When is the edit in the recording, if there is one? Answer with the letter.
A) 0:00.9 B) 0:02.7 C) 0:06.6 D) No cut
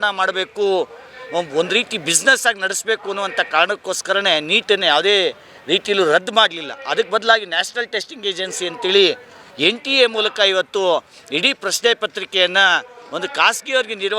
D